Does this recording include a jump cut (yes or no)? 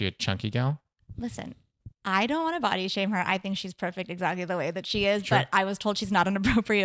no